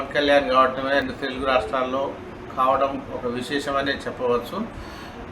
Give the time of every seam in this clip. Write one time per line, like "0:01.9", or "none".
0:01.0